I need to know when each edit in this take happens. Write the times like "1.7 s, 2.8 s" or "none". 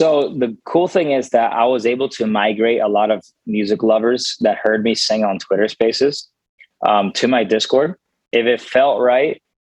8.1 s

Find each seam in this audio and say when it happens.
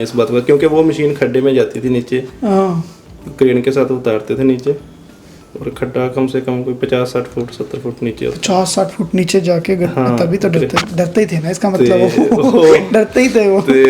none

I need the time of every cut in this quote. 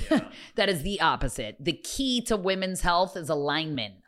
none

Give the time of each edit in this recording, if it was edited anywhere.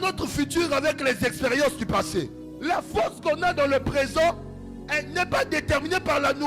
2.4 s

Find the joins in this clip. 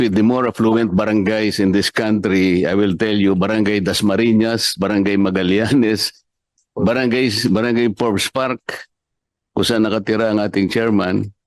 none

